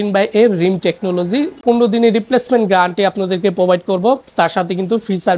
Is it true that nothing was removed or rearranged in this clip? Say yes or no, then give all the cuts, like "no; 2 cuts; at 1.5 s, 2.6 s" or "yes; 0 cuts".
no; 1 cut; at 1.6 s